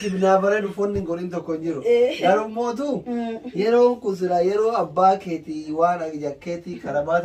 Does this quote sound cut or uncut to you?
uncut